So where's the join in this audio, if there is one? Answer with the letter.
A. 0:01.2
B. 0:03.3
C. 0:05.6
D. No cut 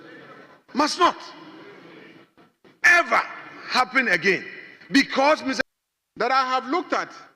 C